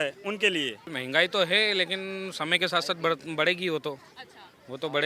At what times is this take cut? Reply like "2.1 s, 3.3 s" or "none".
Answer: 0.9 s